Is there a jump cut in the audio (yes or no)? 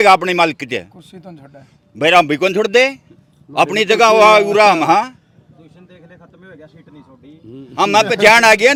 no